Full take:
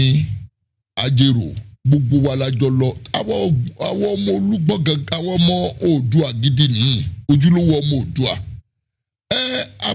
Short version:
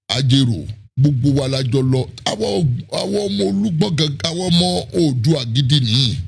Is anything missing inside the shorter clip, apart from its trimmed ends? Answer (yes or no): no